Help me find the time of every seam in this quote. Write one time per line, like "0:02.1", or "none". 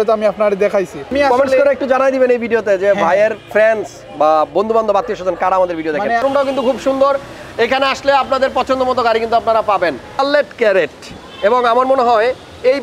0:01.1
0:06.2
0:10.2